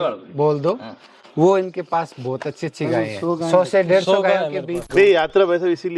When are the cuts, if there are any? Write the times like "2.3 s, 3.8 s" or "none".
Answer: 4.8 s